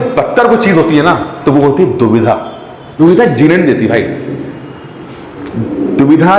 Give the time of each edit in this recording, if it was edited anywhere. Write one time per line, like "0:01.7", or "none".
0:02.8